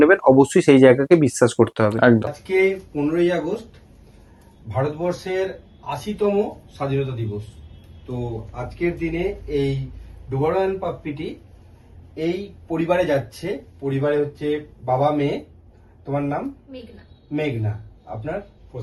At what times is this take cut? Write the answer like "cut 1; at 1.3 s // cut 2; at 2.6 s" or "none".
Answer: none